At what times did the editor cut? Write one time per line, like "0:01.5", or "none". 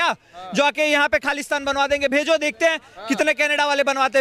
none